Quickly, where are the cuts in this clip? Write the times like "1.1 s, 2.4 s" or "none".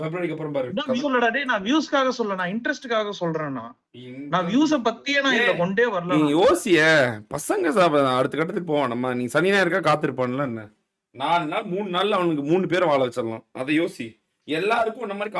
1.0 s